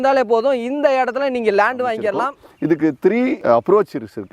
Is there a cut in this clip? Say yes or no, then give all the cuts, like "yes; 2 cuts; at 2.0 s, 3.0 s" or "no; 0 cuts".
yes; 2 cuts; at 2.3 s, 3.4 s